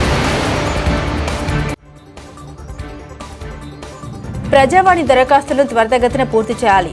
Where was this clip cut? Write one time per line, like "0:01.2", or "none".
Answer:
0:03.1